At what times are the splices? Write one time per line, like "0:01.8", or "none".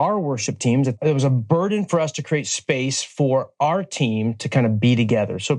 0:00.9